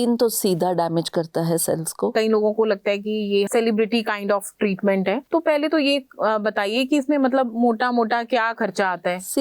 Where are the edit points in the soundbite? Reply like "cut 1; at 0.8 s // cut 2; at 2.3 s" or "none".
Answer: cut 1; at 2.1 s // cut 2; at 3.5 s // cut 3; at 5.2 s

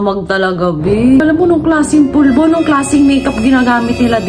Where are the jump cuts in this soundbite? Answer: cut 1; at 1.2 s

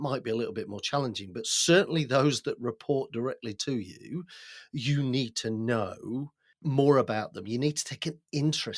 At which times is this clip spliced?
cut 1; at 6.4 s

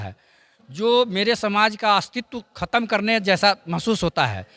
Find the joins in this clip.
none

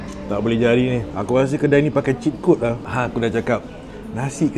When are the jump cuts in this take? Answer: cut 1; at 1.1 s // cut 2; at 2.8 s

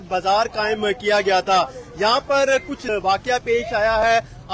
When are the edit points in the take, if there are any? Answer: cut 1; at 2.8 s

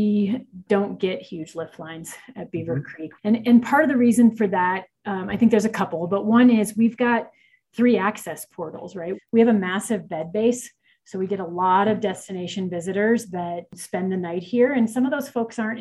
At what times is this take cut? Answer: cut 1; at 3.0 s // cut 2; at 9.2 s // cut 3; at 13.8 s

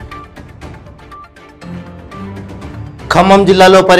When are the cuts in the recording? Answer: cut 1; at 2.7 s

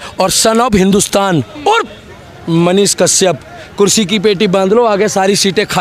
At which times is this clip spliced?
none

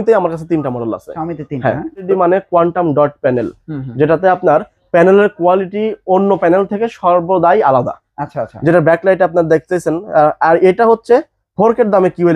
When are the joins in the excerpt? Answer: cut 1; at 2.1 s

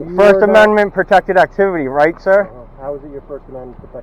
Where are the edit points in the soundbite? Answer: none

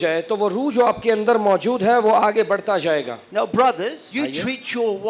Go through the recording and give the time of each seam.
cut 1; at 3.2 s // cut 2; at 4.0 s

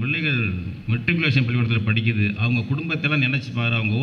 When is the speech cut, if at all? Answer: none

